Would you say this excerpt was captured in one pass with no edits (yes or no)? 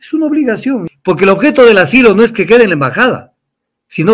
no